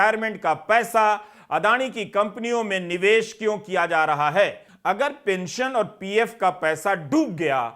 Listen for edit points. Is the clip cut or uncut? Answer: cut